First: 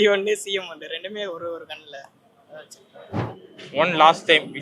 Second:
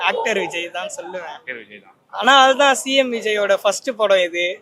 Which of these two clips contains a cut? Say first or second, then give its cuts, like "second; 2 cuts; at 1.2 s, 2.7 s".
first; 1 cut; at 3.3 s